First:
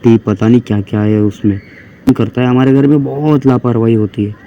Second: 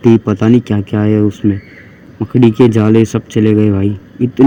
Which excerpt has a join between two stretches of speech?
first; 1 cut; at 2.1 s

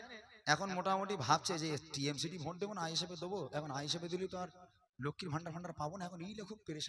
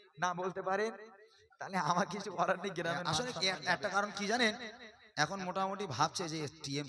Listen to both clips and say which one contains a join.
second; 1 cut; at 3.2 s

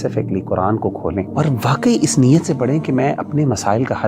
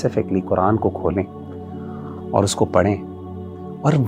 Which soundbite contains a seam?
first; 1 cut; at 1.3 s

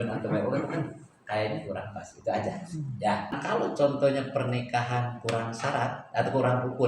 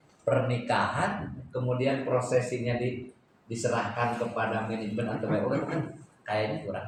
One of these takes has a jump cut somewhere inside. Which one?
first; 1 cut; at 3.4 s

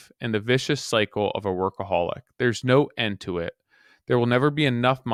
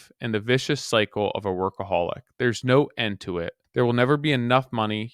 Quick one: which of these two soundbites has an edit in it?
second; 1 cut; at 3.5 s

